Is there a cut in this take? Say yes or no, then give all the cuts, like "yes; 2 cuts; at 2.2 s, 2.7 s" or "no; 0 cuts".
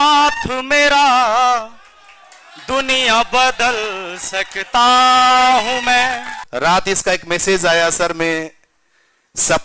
yes; 1 cut; at 6.3 s